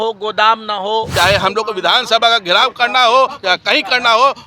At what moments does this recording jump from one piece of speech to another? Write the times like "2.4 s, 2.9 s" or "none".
1.1 s